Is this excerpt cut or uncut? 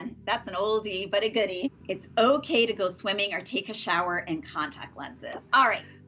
cut